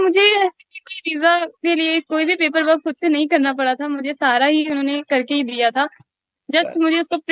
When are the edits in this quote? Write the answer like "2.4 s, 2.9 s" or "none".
none